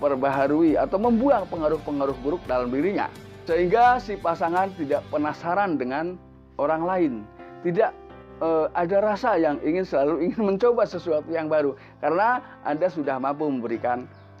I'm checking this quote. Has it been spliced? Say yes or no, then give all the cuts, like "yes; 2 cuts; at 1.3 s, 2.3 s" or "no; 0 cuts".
no; 0 cuts